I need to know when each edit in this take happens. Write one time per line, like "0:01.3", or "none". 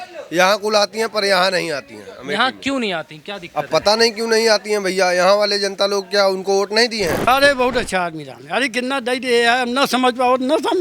0:07.3